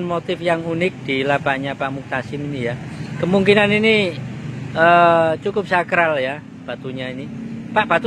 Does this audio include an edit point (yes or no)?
no